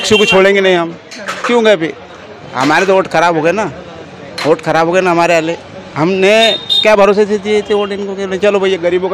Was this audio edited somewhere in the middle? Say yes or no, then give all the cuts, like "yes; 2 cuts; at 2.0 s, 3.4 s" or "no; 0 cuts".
no; 0 cuts